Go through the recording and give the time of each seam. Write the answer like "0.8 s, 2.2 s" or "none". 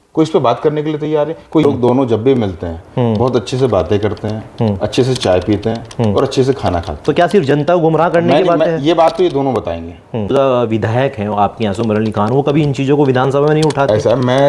1.6 s, 10.3 s

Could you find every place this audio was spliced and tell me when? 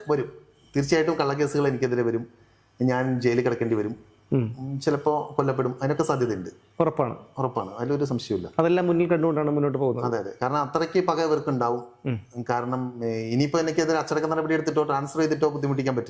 none

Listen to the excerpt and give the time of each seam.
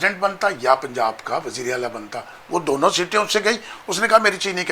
none

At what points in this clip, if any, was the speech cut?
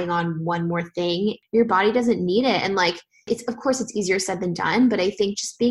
1.4 s, 3.3 s

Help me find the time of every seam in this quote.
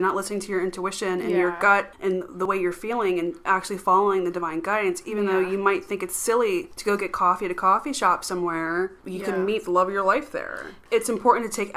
2.2 s, 6.7 s, 9.0 s, 10.7 s

